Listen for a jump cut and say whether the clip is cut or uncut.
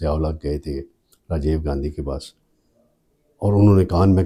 uncut